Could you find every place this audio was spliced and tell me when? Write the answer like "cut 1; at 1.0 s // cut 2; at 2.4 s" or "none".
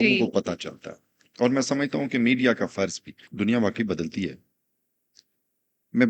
cut 1; at 3.2 s